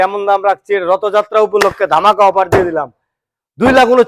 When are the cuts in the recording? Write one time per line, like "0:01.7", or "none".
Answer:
none